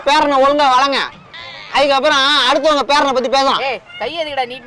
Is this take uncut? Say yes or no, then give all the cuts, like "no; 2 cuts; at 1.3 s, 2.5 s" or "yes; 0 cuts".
yes; 0 cuts